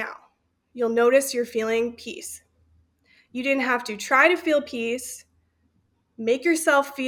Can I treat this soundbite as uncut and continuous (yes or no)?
yes